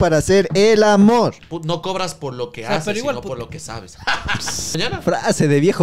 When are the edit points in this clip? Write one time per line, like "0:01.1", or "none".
0:01.5
0:04.8